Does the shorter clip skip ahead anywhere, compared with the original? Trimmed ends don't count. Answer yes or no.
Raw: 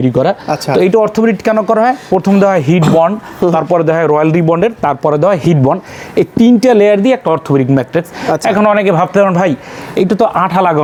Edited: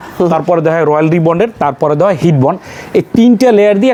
no